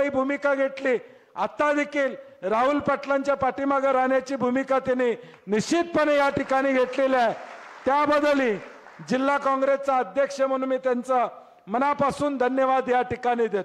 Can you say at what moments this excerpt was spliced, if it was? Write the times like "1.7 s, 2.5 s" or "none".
none